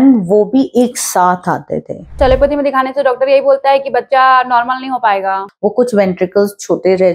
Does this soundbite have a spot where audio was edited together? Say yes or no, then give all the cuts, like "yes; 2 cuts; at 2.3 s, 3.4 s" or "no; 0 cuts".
yes; 2 cuts; at 2.1 s, 5.4 s